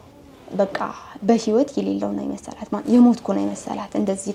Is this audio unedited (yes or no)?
yes